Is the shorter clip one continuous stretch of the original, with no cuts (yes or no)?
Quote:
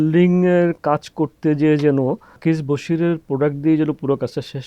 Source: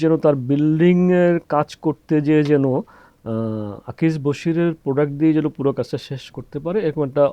no